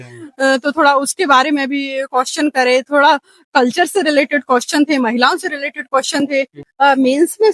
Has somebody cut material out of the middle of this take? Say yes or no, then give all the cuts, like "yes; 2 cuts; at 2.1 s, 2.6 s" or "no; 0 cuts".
yes; 1 cut; at 6.6 s